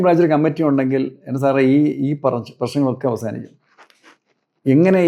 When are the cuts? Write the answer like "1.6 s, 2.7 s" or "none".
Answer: none